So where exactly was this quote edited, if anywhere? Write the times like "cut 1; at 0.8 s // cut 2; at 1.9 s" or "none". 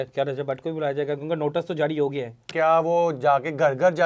cut 1; at 2.4 s